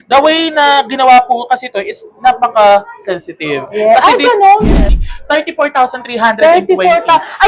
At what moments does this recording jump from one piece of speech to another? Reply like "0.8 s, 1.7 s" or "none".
4.6 s